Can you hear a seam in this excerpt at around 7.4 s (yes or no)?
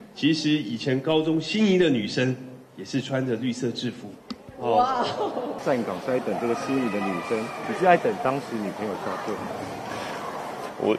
no